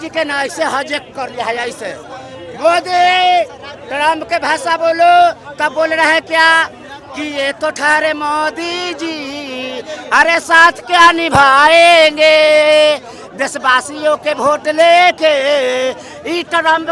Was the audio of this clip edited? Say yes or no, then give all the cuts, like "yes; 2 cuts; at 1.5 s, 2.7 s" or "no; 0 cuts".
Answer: no; 0 cuts